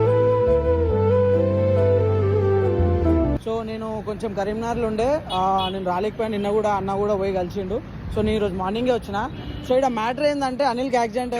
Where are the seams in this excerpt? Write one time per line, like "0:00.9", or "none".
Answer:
none